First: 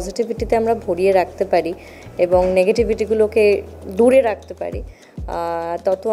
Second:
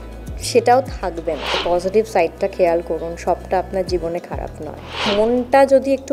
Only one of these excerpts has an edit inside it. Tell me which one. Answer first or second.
second